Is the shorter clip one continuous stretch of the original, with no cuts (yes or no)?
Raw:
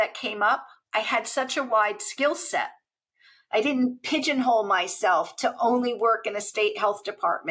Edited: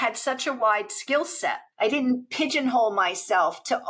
no